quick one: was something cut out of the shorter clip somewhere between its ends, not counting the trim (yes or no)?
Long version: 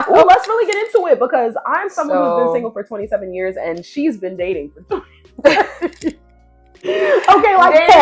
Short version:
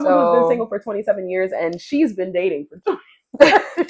no